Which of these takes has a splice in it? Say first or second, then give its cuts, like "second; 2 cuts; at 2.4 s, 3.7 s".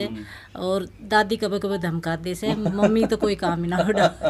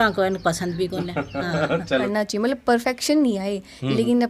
second; 1 cut; at 2.1 s